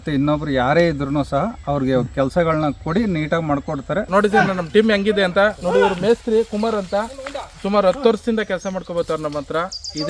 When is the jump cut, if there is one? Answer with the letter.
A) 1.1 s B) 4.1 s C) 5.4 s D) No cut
B